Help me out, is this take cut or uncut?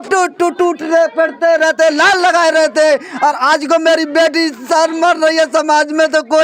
uncut